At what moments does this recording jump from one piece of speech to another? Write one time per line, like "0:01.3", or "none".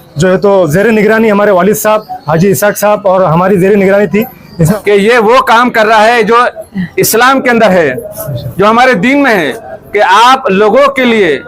0:04.7